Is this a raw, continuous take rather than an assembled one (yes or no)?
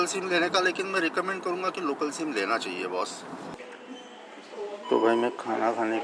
no